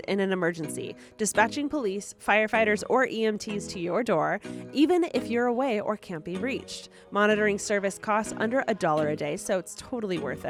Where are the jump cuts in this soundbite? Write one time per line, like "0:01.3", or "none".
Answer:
none